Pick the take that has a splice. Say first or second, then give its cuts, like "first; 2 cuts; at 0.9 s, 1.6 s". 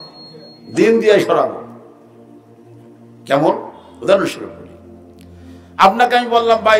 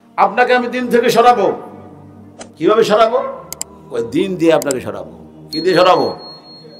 first; 2 cuts; at 1.7 s, 3.2 s